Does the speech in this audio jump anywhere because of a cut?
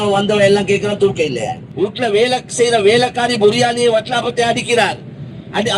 yes; 1 cut; at 1.6 s

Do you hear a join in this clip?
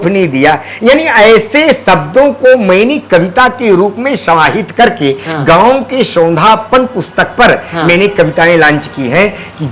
no; 0 cuts

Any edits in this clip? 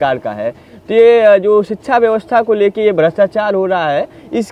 no; 0 cuts

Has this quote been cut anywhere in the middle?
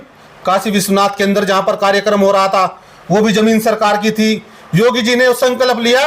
no; 0 cuts

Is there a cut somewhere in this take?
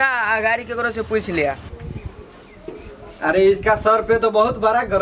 yes; 1 cut; at 1.7 s

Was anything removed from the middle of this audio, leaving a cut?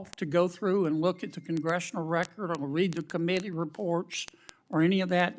no; 0 cuts

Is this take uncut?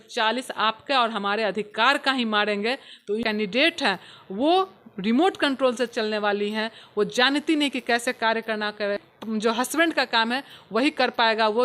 no; 2 cuts; at 3.2 s, 9.0 s

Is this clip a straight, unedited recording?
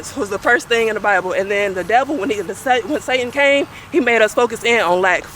yes; 0 cuts

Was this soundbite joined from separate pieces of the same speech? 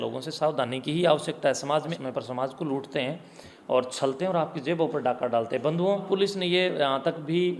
yes; 2 cuts; at 1.8 s, 6.0 s

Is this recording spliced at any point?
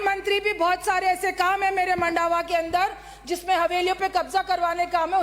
no; 0 cuts

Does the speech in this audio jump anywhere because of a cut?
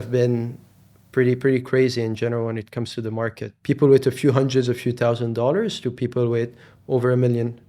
yes; 1 cut; at 3.5 s

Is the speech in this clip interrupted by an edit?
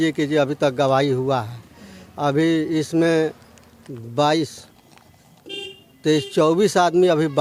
no; 0 cuts

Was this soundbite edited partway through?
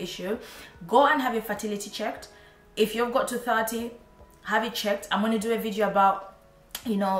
no; 0 cuts

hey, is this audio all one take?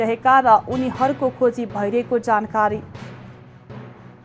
yes; 0 cuts

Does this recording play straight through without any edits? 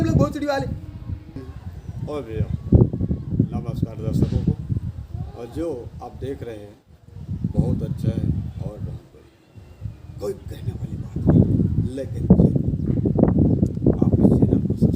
no; 1 cut; at 1.4 s

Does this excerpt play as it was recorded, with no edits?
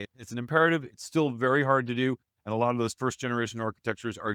yes; 0 cuts

